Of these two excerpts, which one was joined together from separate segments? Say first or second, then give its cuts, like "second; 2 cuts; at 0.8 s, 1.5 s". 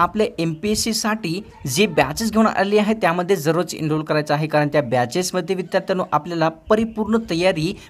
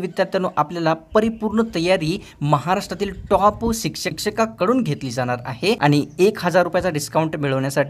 second; 2 cuts; at 4.1 s, 5.8 s